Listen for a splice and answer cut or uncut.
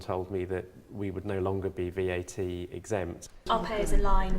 cut